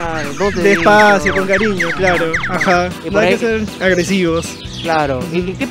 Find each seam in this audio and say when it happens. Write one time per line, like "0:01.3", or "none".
none